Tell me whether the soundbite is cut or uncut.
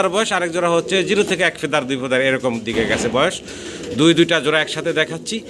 uncut